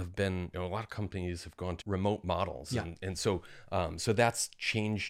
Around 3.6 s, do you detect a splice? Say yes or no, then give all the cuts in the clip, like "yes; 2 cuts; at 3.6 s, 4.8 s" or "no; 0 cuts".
no; 1 cut; at 1.8 s